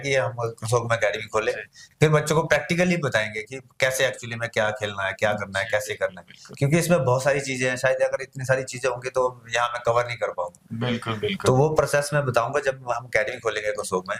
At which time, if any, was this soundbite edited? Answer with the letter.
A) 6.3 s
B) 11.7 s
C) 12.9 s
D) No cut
D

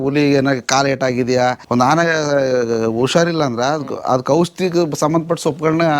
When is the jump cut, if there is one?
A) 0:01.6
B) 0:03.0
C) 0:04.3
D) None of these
A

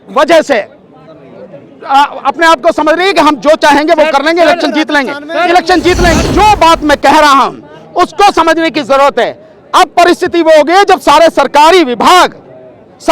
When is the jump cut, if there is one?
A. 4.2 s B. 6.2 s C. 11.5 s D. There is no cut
B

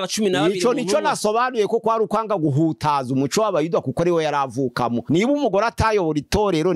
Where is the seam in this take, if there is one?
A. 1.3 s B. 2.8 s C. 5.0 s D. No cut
C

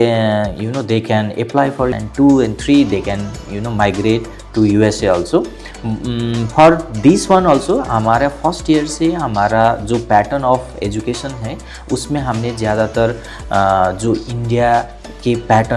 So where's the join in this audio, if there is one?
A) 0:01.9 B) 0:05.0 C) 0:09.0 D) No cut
A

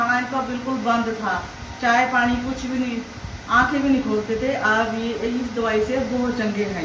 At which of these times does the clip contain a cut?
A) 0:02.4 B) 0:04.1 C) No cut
C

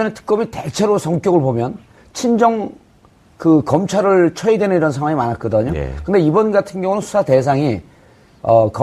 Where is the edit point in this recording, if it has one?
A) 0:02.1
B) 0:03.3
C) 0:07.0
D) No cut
A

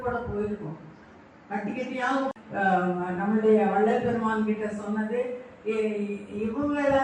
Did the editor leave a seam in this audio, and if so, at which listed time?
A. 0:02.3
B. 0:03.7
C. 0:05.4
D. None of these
A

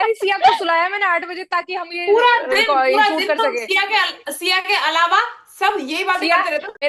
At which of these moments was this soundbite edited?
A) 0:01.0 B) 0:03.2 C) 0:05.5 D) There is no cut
D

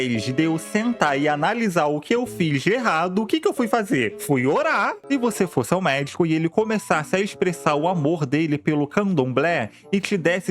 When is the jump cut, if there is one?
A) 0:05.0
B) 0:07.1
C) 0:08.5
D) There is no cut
A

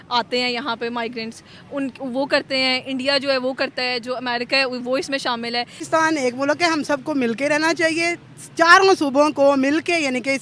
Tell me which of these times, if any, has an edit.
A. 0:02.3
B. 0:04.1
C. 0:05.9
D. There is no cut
C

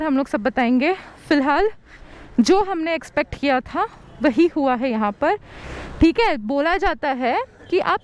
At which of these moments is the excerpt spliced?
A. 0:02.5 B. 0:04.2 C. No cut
C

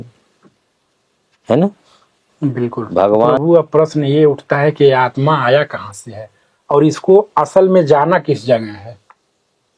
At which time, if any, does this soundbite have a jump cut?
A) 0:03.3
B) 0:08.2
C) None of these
A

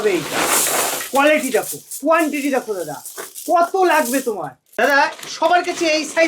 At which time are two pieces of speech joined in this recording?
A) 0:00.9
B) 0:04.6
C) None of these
B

